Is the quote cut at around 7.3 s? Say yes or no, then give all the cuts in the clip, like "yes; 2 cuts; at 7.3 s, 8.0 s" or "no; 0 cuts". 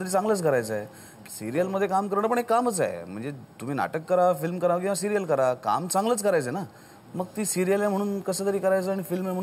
no; 1 cut; at 1.1 s